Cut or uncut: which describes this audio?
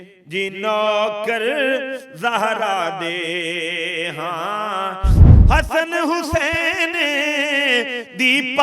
cut